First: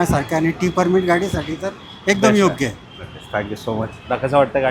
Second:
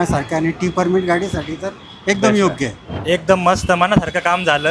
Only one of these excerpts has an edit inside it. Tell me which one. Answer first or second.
second